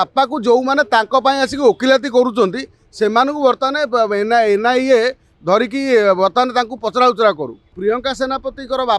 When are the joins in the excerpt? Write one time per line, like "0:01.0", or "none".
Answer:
0:07.7